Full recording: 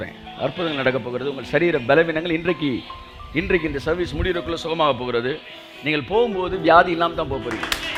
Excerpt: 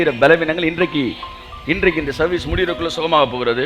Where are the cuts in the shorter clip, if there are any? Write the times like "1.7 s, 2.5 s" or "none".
none